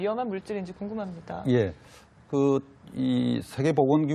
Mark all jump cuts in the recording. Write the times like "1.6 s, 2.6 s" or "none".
2.9 s